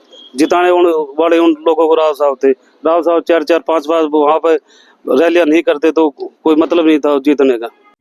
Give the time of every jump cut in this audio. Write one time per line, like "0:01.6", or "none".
none